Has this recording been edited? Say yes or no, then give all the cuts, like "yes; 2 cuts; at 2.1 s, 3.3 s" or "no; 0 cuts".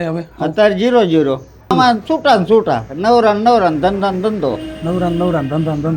yes; 1 cut; at 1.7 s